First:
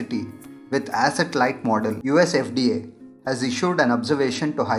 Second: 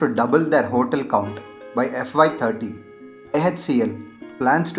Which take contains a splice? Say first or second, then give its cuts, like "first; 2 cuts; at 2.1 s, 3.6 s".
first; 1 cut; at 2.0 s